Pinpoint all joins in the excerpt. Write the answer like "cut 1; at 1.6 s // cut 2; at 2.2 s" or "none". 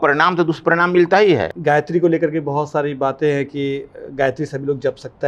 cut 1; at 1.5 s